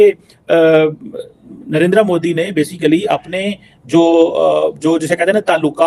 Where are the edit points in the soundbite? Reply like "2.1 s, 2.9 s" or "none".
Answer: none